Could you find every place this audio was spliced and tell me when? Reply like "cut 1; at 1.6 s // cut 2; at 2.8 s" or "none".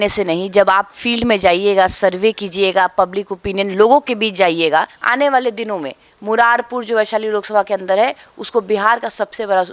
cut 1; at 5.0 s